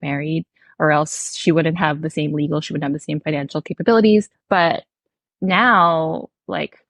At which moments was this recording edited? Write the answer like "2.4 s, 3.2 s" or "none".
4.4 s